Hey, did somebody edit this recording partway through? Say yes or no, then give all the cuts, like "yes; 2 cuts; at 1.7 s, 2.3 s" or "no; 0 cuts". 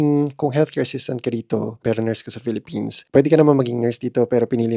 yes; 1 cut; at 1.8 s